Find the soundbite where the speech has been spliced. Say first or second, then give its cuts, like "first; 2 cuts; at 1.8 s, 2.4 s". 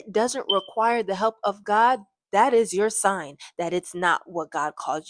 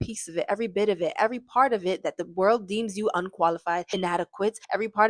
second; 1 cut; at 4.1 s